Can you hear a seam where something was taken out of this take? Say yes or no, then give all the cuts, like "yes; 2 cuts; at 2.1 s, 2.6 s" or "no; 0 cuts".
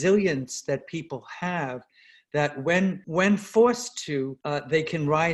yes; 2 cuts; at 3.0 s, 4.4 s